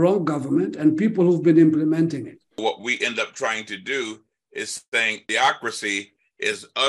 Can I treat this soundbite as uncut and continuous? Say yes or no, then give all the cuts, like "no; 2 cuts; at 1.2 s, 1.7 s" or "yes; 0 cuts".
no; 2 cuts; at 2.6 s, 5.2 s